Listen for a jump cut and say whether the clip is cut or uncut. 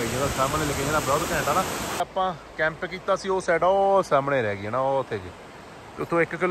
cut